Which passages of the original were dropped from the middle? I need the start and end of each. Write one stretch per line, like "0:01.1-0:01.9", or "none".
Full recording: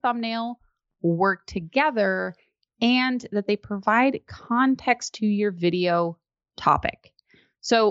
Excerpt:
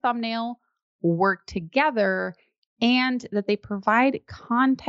none